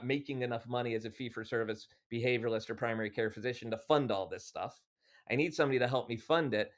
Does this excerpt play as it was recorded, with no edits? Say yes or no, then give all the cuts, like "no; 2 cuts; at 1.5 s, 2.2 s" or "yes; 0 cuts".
yes; 0 cuts